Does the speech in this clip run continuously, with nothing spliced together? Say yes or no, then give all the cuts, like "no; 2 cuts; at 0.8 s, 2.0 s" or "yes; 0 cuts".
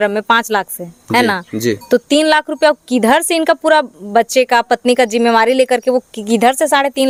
yes; 0 cuts